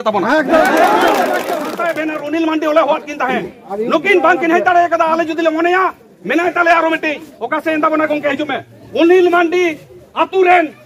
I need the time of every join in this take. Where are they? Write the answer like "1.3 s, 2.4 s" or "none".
1.7 s